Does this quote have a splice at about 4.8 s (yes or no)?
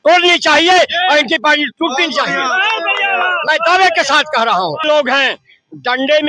yes